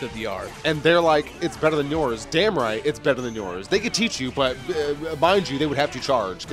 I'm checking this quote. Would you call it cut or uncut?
uncut